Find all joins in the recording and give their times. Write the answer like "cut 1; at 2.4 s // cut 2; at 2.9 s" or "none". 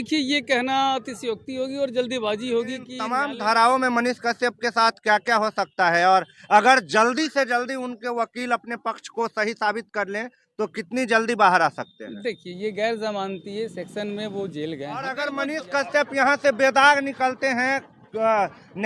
cut 1; at 3.0 s // cut 2; at 15.1 s